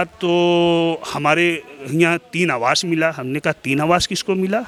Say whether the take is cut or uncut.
uncut